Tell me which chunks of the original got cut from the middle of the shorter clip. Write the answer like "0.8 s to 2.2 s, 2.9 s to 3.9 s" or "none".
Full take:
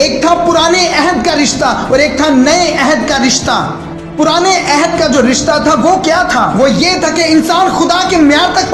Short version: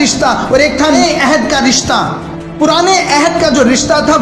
2.4 s to 2.6 s